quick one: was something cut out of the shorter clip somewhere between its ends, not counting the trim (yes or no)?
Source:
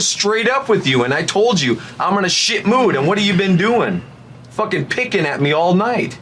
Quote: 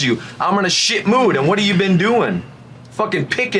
no